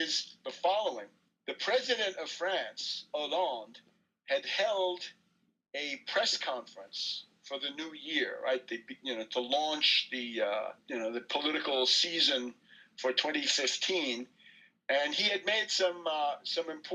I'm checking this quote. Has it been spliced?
no; 0 cuts

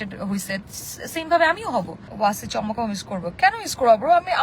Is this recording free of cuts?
no; 1 cut; at 2.0 s

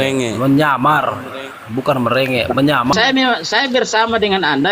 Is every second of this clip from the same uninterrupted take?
no; 1 cut; at 2.9 s

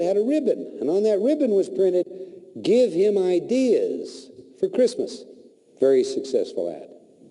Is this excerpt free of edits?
no; 1 cut; at 1.0 s

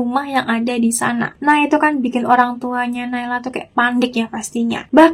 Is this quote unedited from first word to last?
yes; 0 cuts

